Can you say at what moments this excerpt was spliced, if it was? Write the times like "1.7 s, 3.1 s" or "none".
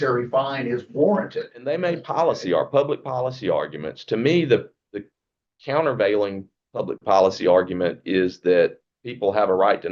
1.5 s

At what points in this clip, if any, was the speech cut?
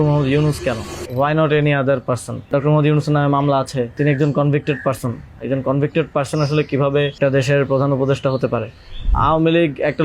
1.0 s, 2.5 s, 3.9 s, 7.2 s, 9.1 s

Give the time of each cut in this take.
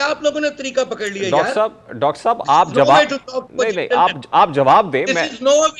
none

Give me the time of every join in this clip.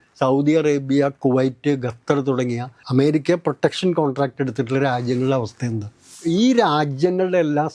2.7 s, 6.1 s

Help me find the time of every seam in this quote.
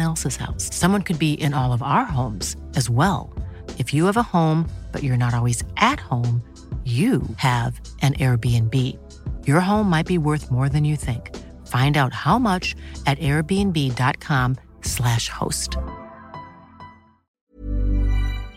17.4 s

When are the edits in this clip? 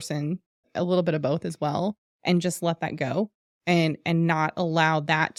none

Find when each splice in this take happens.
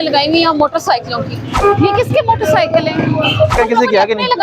1.5 s, 3.5 s

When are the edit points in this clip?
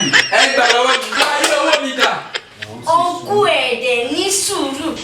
1.2 s

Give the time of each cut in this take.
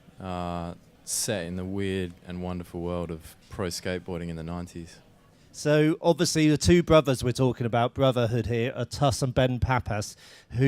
7.9 s

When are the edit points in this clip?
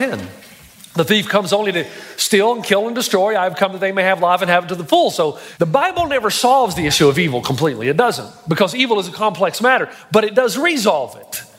5.4 s

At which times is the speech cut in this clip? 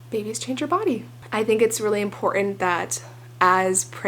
1.2 s

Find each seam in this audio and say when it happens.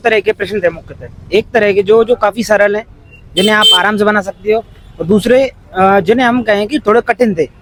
none

